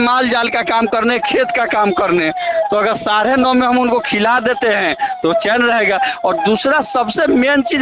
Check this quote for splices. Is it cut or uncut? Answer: uncut